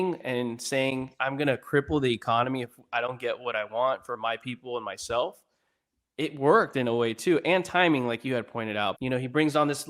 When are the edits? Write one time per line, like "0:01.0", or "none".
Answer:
0:09.0

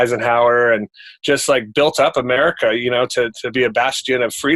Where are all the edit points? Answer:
none

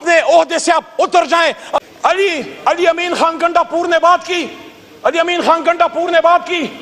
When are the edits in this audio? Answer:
0:01.7

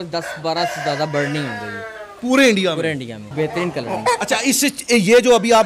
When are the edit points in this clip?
0:03.2

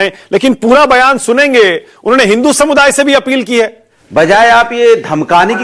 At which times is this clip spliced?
0:03.9

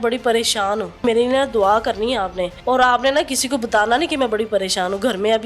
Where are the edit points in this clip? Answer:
0:01.0
0:02.5

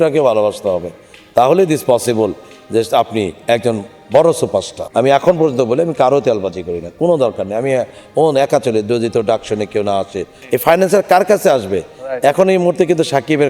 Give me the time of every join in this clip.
0:04.8
0:10.3

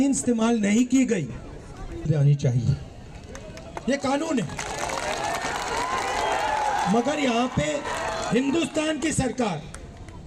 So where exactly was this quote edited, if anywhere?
none

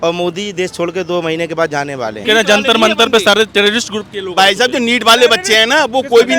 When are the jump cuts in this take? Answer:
0:02.2

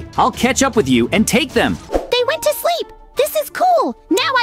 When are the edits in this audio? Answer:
0:01.8

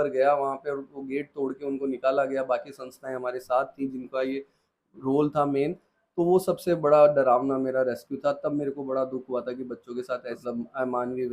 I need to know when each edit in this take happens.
0:10.4

